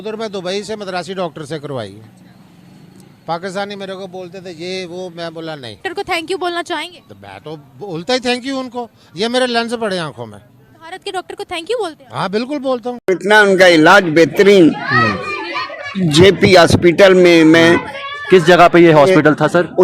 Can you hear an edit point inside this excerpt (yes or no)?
yes